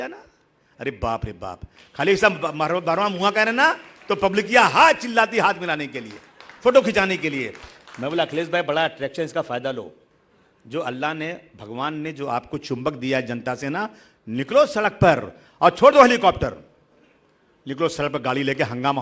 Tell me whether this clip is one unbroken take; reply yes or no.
yes